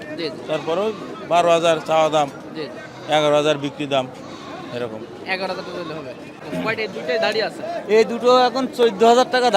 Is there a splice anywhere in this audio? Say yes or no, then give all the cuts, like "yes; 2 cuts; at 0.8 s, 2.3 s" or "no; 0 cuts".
yes; 1 cut; at 6.3 s